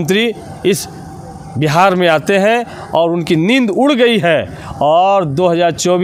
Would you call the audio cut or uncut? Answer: uncut